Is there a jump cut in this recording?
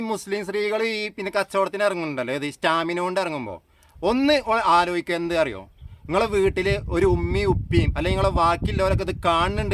no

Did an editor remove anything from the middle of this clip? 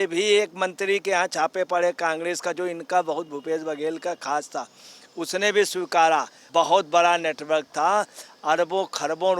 yes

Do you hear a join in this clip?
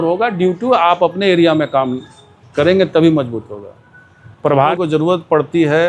yes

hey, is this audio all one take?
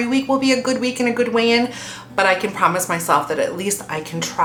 yes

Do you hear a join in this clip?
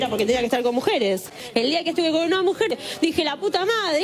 no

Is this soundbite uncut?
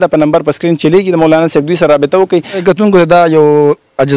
no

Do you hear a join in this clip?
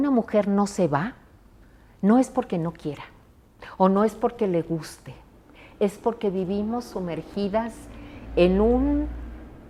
no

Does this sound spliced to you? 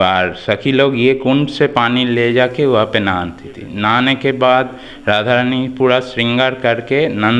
no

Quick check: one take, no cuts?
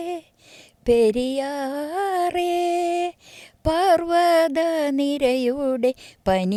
yes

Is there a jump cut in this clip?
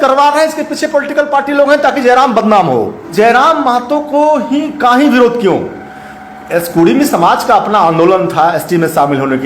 yes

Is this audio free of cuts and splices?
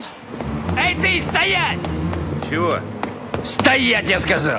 yes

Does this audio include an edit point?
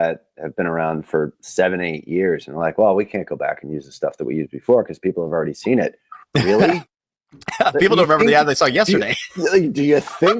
no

